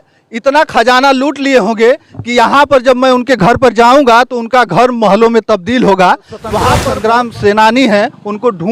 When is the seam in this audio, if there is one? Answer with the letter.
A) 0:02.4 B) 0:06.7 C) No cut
B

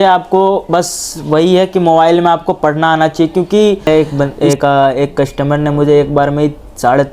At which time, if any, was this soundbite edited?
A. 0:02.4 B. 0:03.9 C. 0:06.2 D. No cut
B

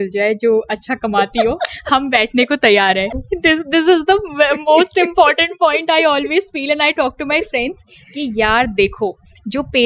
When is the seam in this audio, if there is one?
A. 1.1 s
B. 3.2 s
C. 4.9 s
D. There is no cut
B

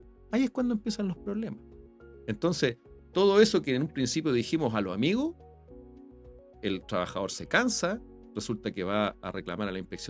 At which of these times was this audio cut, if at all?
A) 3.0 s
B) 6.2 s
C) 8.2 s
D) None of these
D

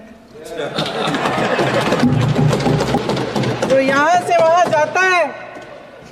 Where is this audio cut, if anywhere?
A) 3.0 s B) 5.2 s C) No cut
A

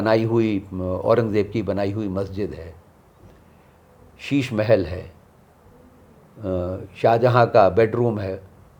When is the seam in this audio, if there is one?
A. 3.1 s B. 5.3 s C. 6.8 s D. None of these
D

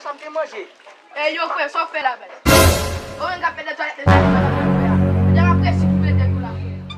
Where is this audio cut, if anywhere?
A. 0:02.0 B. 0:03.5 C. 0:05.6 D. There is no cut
A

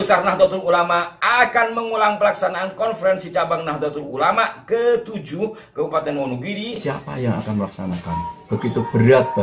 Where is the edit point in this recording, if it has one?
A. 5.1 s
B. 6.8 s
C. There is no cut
B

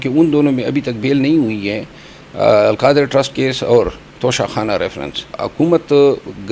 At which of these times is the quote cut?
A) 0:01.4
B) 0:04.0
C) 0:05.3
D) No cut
C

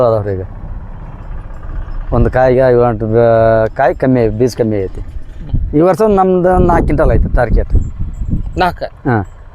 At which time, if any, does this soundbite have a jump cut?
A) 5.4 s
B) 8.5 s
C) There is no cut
A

